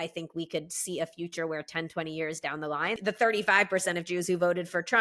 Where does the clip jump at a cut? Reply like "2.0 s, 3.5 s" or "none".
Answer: 3.0 s